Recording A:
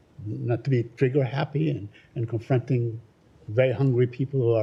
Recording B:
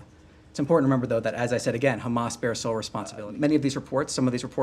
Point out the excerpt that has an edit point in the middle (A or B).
B